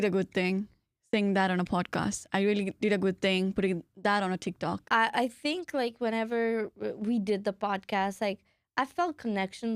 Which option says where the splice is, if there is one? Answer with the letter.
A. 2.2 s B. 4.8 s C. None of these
B